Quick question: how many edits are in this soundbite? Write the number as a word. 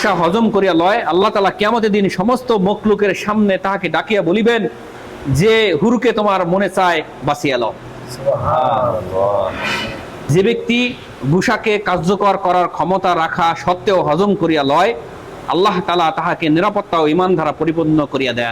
two